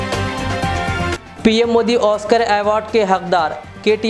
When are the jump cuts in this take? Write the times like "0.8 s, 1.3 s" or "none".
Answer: 0.9 s